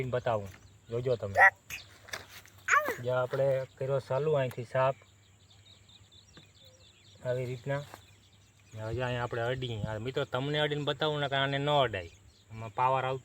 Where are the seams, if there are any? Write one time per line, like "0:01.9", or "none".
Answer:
0:01.1